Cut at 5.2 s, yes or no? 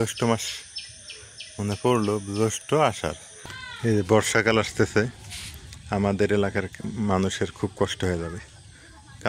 no